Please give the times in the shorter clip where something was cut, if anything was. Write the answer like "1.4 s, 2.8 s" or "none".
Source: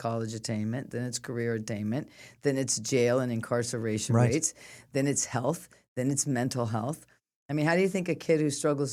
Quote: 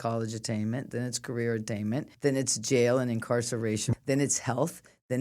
2.1 s, 3.8 s

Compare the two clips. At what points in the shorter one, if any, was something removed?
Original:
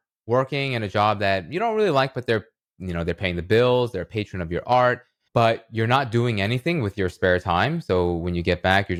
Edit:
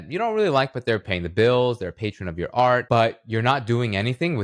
1.2 s, 2.8 s

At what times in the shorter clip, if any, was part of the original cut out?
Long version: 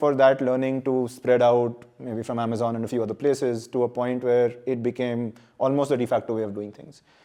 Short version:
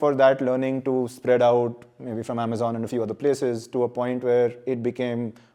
none

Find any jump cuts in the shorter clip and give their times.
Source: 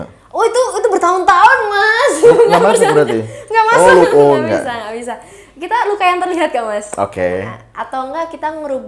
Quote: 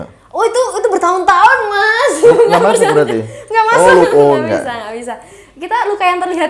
none

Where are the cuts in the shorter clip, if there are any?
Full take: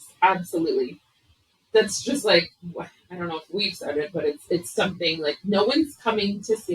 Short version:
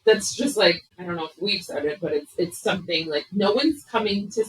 0.9 s

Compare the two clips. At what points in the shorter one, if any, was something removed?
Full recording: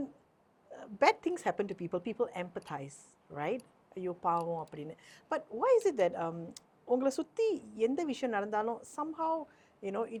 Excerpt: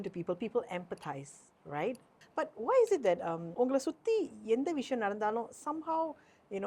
2.1 s, 3.4 s

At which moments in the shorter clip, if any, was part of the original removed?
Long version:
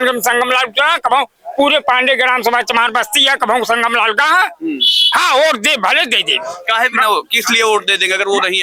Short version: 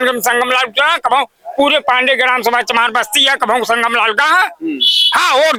none

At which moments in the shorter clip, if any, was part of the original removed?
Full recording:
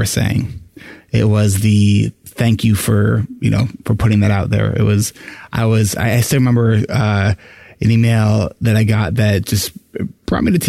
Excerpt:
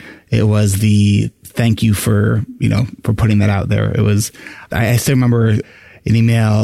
4.7 s, 5.7 s

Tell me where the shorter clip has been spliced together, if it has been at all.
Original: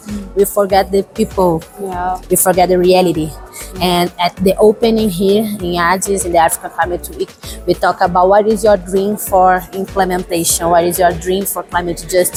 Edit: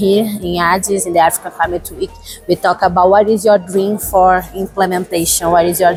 none

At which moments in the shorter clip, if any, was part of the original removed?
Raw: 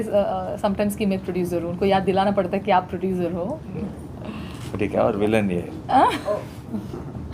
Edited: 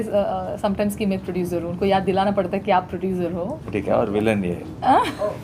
3.6 s

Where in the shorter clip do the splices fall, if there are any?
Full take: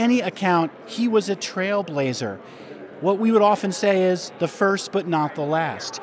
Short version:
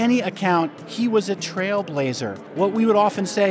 2.4 s

